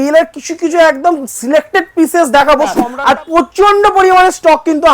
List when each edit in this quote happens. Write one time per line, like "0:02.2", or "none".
0:02.9